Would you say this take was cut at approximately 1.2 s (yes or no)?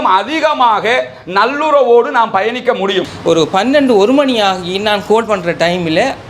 no